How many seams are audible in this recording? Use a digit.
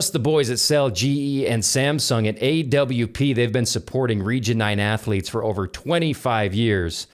0